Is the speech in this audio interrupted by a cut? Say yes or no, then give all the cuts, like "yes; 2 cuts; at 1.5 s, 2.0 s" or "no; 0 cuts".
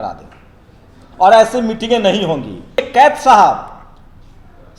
yes; 1 cut; at 2.8 s